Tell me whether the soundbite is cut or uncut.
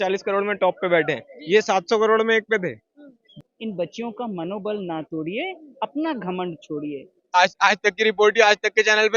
cut